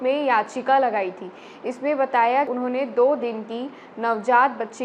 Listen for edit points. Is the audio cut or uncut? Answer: cut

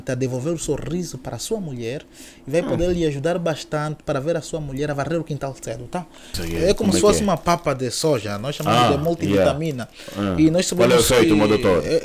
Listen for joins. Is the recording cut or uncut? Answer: cut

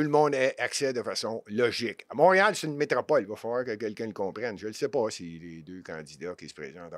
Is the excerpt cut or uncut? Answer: uncut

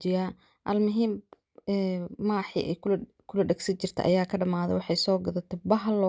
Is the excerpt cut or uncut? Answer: uncut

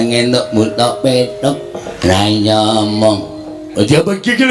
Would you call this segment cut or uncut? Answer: cut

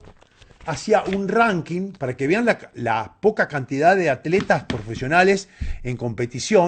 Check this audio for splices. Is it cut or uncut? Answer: uncut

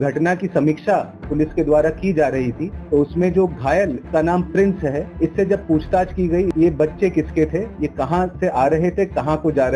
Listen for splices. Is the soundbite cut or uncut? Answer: cut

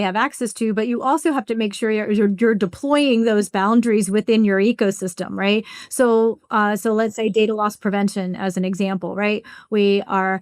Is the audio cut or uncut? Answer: uncut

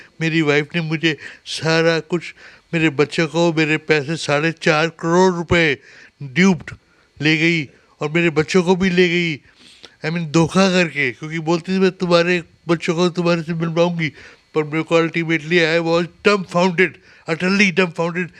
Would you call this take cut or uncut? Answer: uncut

